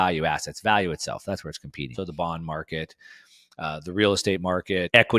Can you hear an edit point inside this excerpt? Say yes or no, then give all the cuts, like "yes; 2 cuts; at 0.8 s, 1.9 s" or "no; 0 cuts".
yes; 1 cut; at 1.9 s